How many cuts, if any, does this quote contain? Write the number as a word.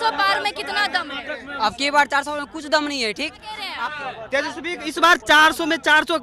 one